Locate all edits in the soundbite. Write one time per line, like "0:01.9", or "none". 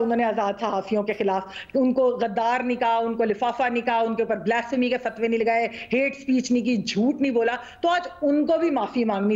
none